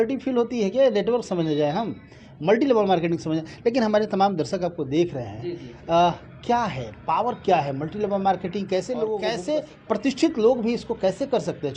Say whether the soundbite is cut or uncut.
cut